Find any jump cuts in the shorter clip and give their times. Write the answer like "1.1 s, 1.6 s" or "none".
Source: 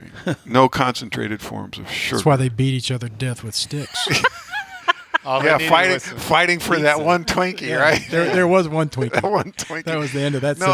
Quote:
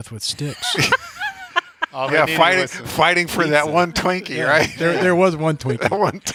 none